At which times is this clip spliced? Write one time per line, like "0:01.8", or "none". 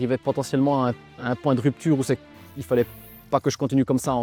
none